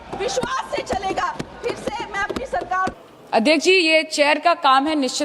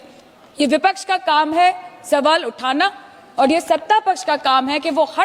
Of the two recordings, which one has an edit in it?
first; 1 cut; at 2.9 s

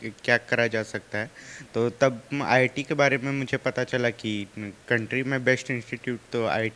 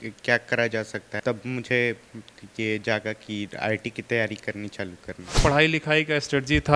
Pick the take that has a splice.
second; 2 cuts; at 1.2 s, 5.4 s

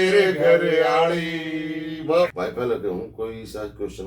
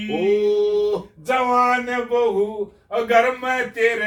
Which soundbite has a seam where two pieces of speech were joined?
first; 1 cut; at 2.3 s

